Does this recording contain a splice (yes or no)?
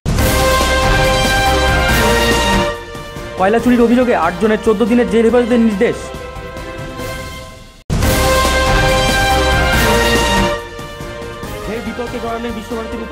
yes